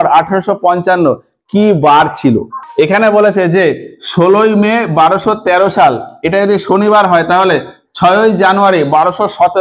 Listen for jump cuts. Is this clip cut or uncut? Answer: cut